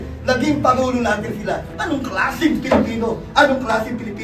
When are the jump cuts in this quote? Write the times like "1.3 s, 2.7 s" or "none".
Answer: 1.7 s